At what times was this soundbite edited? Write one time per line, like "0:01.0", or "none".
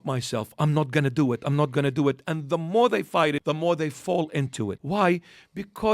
0:03.4
0:04.8